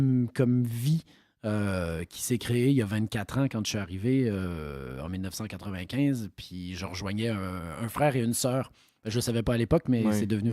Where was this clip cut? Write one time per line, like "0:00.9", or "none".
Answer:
none